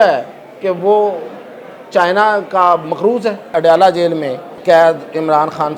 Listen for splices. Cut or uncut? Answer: cut